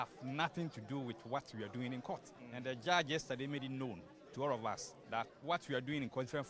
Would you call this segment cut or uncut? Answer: cut